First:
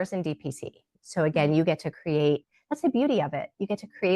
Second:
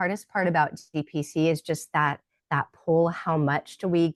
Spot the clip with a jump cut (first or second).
first